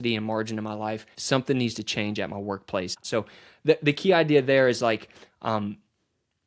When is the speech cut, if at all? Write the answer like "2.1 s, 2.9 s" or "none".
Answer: 1.2 s, 3.0 s

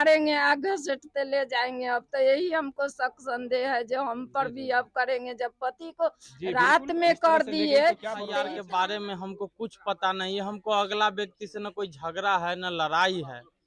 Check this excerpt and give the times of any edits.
8.3 s

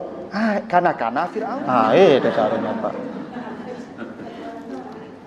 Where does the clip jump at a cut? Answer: 1.3 s

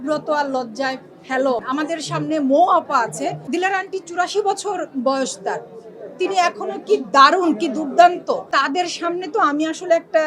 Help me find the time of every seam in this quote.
1.6 s, 3.5 s, 8.4 s

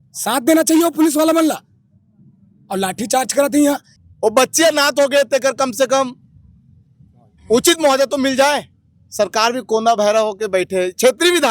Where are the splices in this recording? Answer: 3.9 s

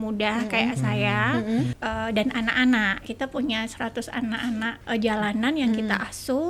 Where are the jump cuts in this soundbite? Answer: 1.8 s, 3.0 s, 4.8 s

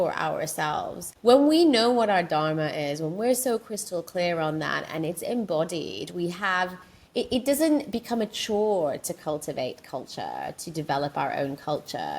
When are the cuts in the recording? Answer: 1.0 s

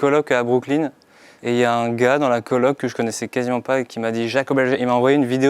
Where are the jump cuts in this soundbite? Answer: none

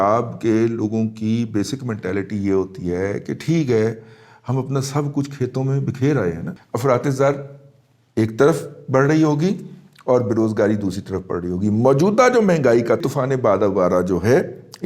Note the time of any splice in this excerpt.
6.5 s, 13.0 s

